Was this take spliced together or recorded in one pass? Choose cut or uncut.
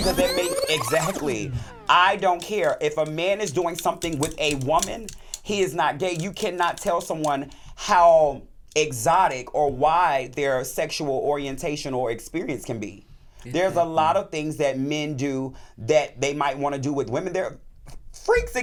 uncut